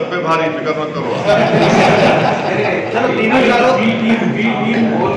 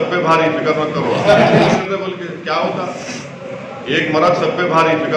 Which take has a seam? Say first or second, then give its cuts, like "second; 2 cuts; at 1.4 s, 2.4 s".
second; 1 cut; at 1.8 s